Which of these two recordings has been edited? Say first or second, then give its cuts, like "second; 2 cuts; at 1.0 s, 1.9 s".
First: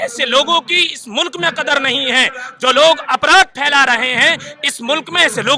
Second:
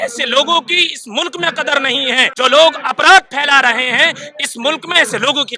second; 1 cut; at 2.3 s